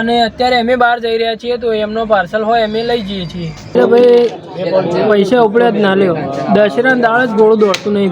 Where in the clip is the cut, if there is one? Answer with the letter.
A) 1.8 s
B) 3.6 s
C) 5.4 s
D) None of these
B